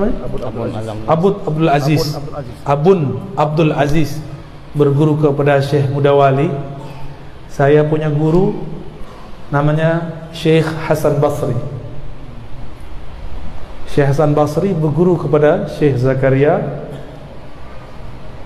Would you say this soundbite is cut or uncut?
uncut